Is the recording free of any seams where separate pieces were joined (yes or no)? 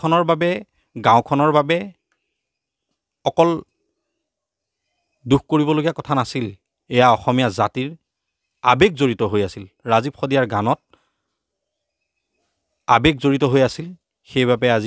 yes